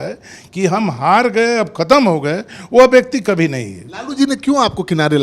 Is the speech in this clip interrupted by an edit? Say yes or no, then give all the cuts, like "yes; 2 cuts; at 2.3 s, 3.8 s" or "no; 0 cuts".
no; 0 cuts